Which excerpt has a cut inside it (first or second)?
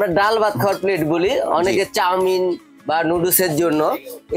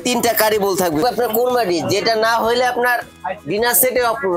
second